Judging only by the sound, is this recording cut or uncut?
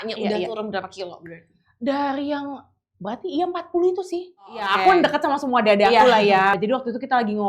cut